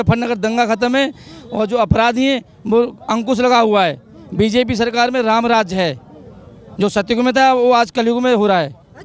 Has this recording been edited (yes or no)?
no